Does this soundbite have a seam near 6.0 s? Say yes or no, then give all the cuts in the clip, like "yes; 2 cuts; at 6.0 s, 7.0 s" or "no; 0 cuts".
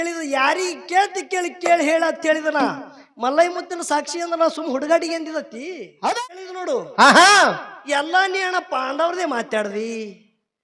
yes; 1 cut; at 6.0 s